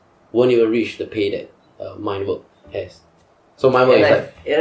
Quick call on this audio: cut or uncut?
uncut